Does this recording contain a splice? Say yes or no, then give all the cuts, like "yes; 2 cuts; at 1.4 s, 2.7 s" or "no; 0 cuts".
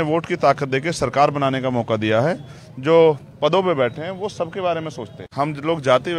yes; 1 cut; at 5.3 s